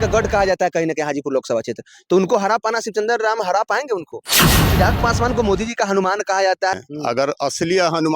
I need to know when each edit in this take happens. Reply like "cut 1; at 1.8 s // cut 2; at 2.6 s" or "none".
cut 1; at 4.6 s // cut 2; at 6.7 s